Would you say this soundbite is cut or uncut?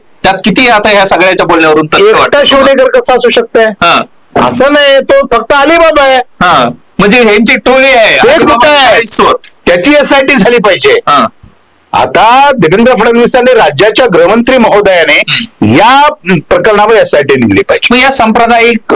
uncut